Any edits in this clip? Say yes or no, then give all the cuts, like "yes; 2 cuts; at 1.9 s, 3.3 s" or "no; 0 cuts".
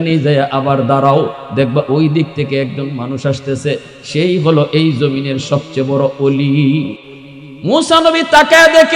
yes; 1 cut; at 7.0 s